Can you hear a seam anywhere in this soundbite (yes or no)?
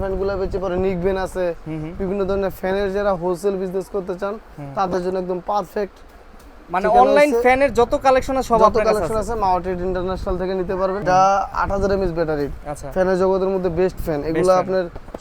yes